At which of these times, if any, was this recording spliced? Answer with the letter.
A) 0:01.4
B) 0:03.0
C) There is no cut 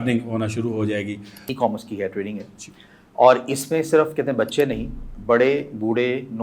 A